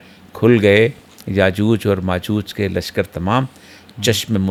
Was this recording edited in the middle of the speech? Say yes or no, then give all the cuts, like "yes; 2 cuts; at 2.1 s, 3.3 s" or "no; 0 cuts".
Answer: no; 0 cuts